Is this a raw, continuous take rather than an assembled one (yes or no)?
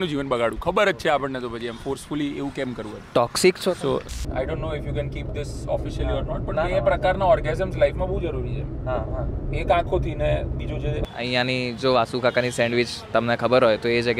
no